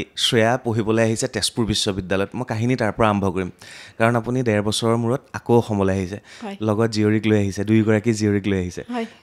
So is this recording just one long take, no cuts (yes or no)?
yes